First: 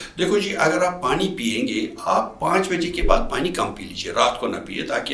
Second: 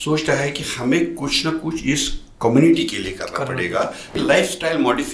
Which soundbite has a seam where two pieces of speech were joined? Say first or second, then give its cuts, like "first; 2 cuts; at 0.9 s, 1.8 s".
second; 1 cut; at 4.1 s